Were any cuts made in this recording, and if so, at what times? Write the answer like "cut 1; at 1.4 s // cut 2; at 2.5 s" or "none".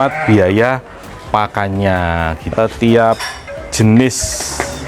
cut 1; at 2.4 s